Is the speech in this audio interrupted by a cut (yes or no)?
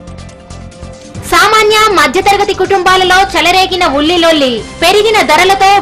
yes